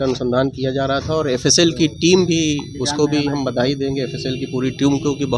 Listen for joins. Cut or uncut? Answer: uncut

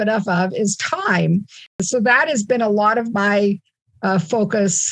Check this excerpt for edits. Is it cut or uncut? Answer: cut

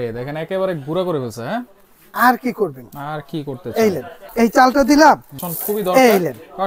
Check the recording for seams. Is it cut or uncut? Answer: cut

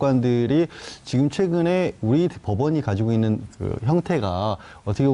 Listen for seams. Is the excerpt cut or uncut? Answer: uncut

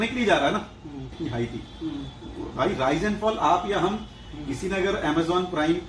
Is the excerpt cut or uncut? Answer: cut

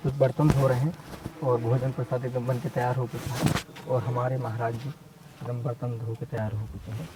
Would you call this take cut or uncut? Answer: uncut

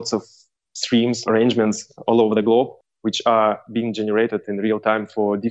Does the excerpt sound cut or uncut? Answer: cut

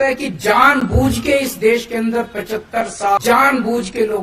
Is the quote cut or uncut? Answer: cut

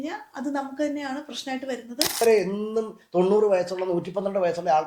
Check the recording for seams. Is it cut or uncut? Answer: cut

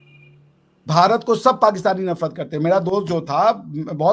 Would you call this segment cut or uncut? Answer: uncut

